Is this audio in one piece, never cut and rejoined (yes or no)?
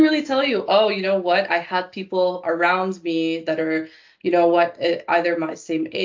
yes